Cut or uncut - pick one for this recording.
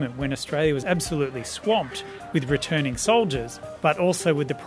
uncut